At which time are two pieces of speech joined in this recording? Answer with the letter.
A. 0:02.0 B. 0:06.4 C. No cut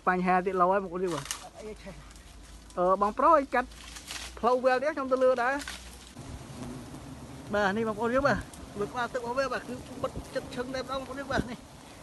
B